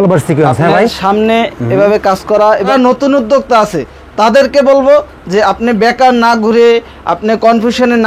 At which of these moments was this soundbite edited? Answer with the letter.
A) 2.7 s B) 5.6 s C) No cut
A